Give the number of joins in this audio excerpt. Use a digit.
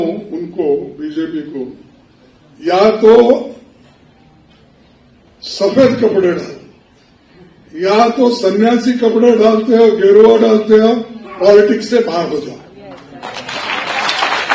0